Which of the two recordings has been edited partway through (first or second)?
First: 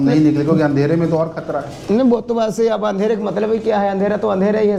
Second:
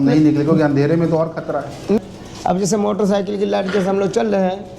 second